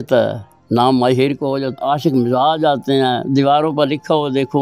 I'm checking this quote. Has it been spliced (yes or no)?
yes